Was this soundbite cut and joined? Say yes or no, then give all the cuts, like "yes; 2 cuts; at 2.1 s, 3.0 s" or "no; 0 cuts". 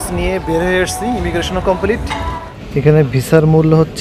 yes; 1 cut; at 2.5 s